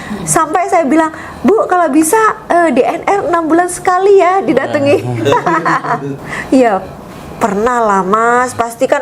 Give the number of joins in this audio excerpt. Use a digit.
1